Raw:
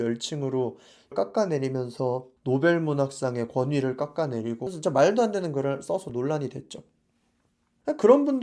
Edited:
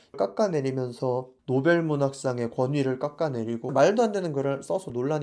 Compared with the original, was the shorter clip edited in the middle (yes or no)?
yes